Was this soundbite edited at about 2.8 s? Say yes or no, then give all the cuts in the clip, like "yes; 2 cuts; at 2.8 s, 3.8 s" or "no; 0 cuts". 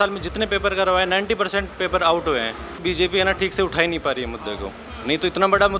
yes; 1 cut; at 2.8 s